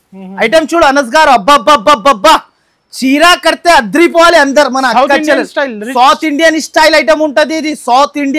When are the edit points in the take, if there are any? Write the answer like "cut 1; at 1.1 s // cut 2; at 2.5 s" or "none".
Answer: none